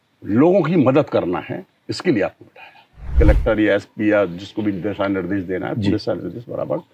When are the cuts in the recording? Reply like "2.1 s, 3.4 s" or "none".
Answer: 3.1 s

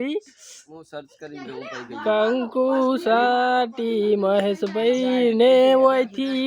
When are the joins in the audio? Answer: none

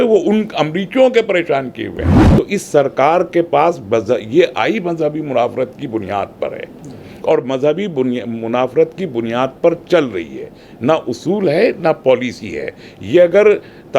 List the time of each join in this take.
2.2 s

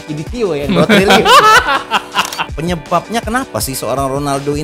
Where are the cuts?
2.5 s

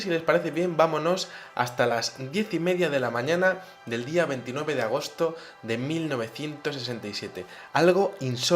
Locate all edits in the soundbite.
4.0 s

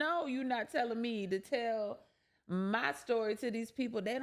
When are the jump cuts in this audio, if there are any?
none

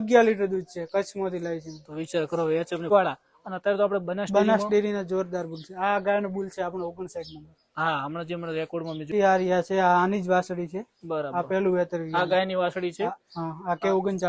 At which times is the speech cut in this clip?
2.9 s, 9.1 s

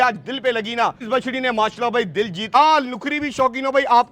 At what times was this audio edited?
1.0 s, 2.5 s

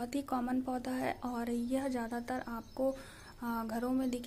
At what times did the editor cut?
none

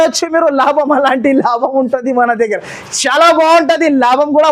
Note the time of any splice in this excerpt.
none

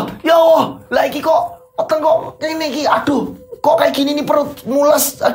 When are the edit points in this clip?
none

